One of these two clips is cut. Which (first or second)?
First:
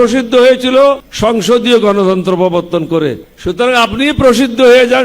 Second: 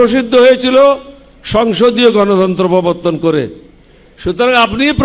first